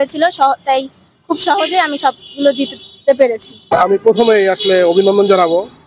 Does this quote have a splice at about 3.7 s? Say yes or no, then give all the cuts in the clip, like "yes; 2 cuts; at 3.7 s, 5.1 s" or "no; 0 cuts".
yes; 1 cut; at 3.7 s